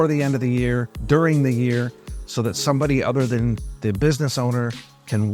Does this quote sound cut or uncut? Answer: uncut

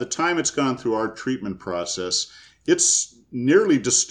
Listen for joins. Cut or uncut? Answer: uncut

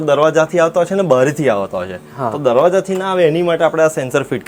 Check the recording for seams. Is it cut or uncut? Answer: uncut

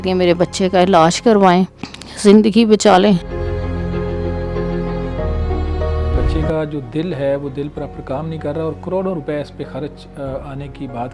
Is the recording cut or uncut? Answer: uncut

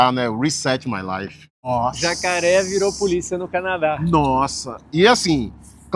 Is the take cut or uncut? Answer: cut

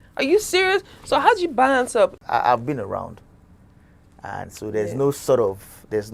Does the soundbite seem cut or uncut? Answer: cut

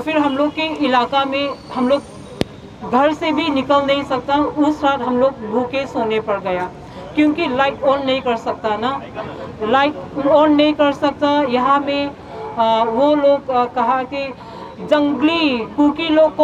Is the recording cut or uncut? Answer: uncut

